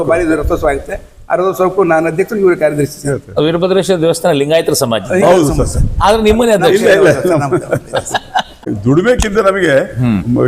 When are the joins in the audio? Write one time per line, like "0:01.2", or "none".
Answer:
0:08.7

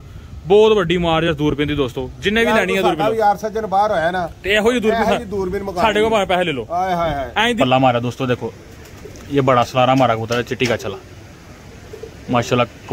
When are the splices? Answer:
0:07.6

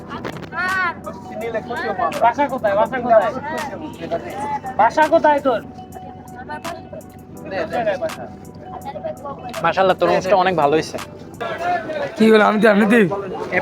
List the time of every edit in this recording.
0:11.5

